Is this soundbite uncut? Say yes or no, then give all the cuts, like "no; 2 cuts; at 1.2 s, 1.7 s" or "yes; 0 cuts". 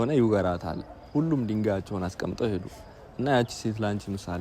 yes; 0 cuts